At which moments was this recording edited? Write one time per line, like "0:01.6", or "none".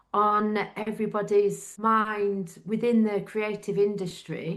0:01.7